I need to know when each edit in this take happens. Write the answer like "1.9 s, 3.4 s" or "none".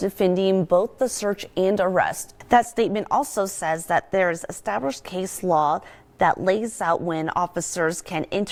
none